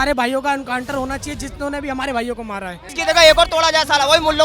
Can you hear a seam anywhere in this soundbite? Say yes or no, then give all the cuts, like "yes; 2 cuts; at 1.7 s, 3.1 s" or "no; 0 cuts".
yes; 1 cut; at 2.8 s